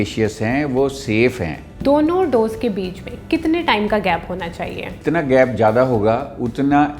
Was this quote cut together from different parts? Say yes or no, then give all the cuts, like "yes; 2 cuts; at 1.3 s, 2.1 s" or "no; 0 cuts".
yes; 2 cuts; at 1.8 s, 4.9 s